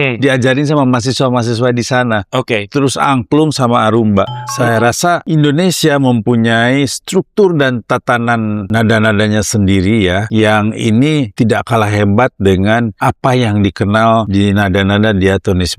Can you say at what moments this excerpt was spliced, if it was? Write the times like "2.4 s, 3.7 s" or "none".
4.6 s, 8.6 s, 10.3 s, 11.3 s, 12.9 s, 14.3 s